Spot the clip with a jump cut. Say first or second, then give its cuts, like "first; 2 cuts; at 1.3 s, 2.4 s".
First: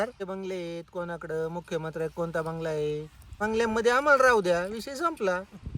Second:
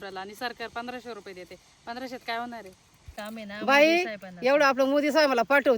second; 1 cut; at 3.1 s